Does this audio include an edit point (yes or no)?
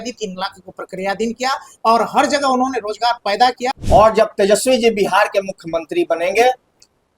yes